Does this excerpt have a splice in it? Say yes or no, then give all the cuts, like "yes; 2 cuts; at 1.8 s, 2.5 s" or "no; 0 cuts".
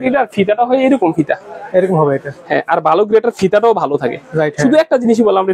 no; 0 cuts